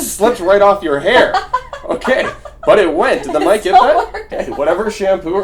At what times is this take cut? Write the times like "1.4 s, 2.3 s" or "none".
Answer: 4.2 s